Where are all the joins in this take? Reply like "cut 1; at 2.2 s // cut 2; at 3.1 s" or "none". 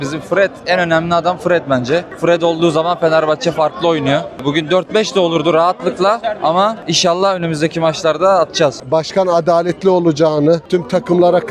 cut 1; at 8.8 s